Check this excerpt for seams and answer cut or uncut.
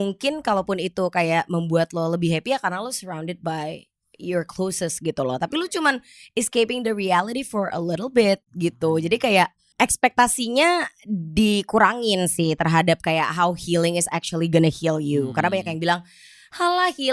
cut